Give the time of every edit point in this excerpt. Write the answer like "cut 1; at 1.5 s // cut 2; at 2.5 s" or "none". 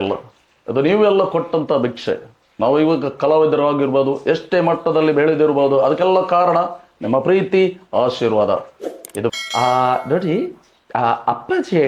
cut 1; at 9.3 s